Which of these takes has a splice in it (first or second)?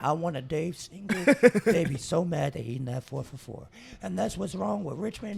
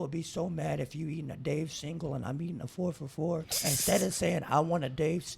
second